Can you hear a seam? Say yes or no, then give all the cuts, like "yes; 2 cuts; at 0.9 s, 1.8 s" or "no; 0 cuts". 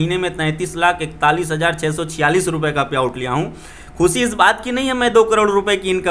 no; 0 cuts